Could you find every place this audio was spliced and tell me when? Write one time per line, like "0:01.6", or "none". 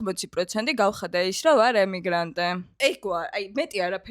0:02.7